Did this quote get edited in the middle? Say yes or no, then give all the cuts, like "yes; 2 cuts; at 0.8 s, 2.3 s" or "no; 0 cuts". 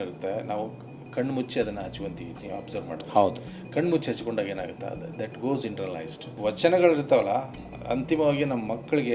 yes; 1 cut; at 6.4 s